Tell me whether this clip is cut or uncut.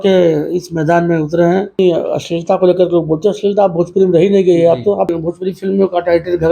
cut